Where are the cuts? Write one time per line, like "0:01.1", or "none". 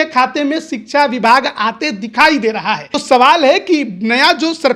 0:02.9